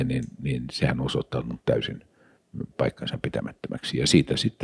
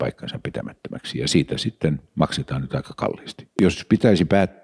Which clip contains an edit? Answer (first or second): second